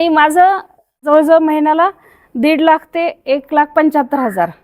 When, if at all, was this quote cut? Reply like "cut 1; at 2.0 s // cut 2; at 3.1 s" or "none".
cut 1; at 1.0 s